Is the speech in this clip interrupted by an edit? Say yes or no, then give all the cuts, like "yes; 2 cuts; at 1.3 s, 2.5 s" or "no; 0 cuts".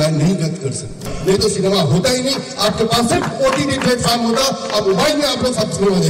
yes; 1 cut; at 1.0 s